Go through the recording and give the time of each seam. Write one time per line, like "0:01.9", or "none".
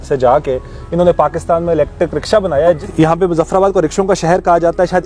0:02.8